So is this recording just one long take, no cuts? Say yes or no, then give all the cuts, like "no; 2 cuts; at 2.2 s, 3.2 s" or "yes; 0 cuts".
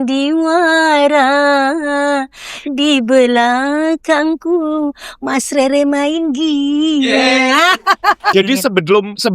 no; 1 cut; at 8.3 s